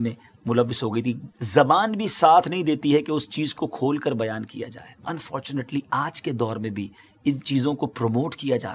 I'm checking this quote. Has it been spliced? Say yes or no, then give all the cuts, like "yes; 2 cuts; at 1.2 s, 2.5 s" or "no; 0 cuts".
yes; 2 cuts; at 1.0 s, 5.0 s